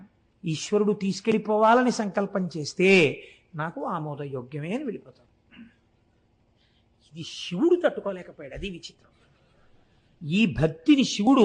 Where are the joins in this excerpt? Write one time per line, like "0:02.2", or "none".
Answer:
none